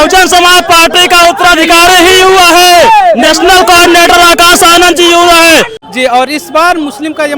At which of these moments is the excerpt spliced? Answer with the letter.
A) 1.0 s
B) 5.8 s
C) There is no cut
B